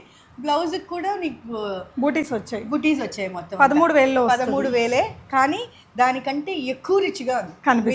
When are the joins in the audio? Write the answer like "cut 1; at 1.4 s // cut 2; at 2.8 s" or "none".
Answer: none